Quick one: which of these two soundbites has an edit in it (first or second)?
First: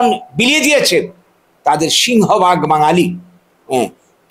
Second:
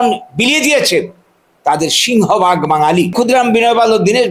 second